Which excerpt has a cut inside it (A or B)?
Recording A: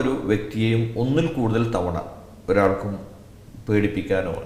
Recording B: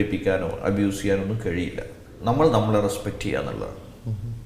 B